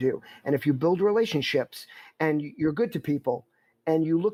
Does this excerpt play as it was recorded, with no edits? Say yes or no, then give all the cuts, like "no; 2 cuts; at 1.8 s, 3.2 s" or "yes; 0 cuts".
yes; 0 cuts